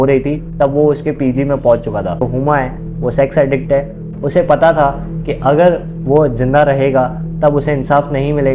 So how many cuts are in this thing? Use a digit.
2